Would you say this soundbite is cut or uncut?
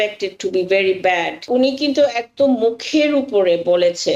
cut